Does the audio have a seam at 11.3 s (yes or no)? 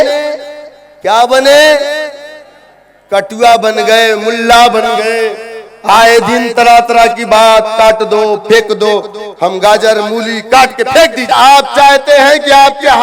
yes